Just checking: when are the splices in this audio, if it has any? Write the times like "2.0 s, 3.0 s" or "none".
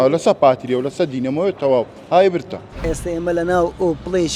2.8 s